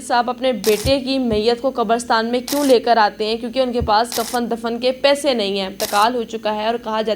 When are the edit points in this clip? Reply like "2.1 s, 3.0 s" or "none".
5.8 s